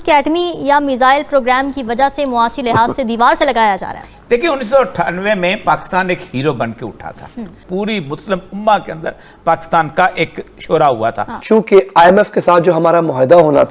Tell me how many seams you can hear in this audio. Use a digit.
2